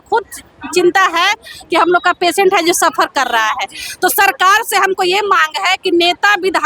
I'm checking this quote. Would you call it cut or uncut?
uncut